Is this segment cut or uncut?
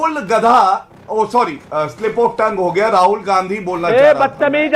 cut